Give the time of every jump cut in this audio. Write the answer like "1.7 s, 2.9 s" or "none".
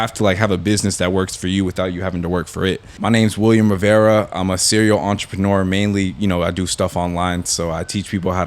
2.9 s